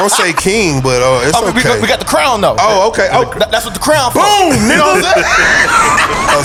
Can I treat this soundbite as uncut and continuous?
yes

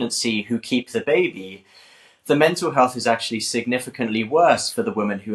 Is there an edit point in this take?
no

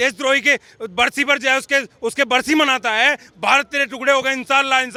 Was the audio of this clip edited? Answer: no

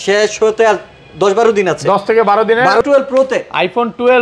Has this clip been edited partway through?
yes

